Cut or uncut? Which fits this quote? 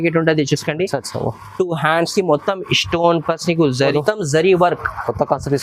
cut